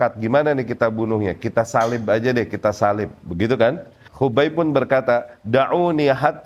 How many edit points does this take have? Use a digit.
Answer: 1